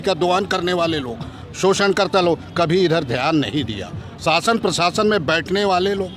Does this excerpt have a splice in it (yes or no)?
no